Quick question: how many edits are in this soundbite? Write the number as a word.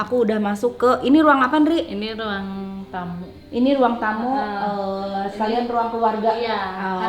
zero